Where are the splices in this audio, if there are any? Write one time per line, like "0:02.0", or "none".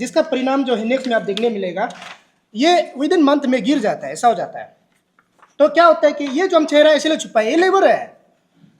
none